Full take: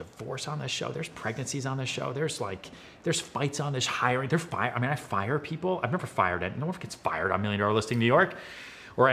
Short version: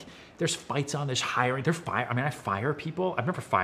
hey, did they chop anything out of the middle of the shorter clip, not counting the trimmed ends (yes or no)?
no